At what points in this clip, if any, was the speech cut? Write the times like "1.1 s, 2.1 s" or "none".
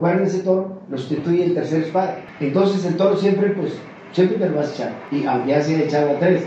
2.3 s, 5.0 s